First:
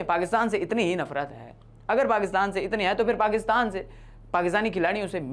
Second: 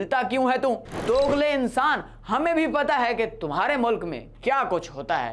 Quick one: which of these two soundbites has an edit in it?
second; 1 cut; at 0.9 s

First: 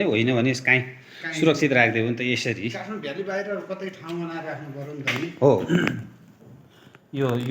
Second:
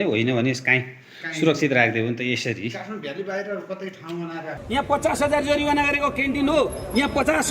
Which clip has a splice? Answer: second; 1 cut; at 4.6 s

